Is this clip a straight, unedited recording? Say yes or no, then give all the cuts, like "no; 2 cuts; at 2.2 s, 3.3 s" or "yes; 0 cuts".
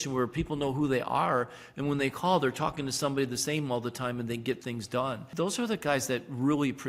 no; 1 cut; at 5.2 s